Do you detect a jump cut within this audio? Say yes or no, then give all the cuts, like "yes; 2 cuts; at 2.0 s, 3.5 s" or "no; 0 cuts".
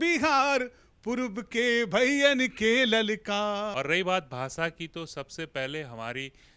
yes; 1 cut; at 3.7 s